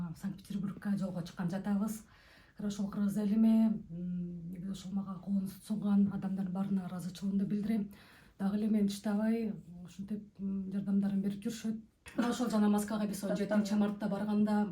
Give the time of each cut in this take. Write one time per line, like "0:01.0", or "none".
0:11.9